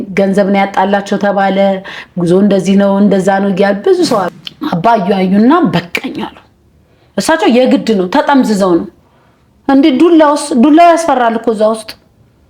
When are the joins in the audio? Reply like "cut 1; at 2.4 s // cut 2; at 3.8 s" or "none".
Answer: cut 1; at 4.3 s